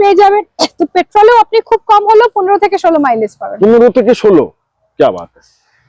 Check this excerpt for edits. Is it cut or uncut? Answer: uncut